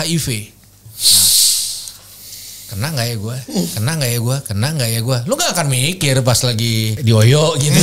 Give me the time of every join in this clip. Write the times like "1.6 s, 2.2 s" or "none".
6.9 s